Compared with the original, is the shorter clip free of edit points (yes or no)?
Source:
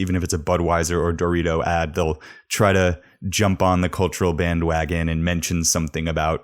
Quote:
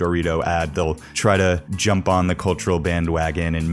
no